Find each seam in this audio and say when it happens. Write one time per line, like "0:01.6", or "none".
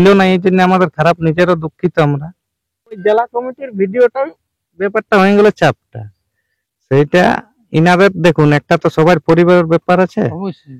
0:03.0